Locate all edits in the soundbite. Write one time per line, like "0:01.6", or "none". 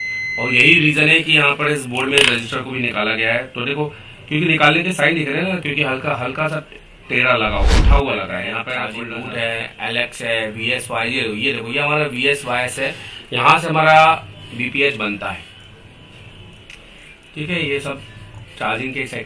0:08.8